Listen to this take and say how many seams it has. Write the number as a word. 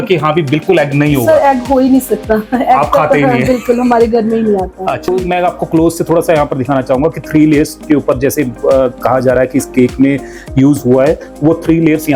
one